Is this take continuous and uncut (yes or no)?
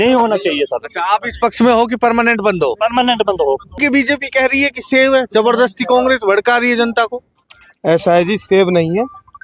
yes